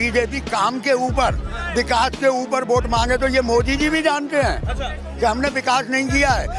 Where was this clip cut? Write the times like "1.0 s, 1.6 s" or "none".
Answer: none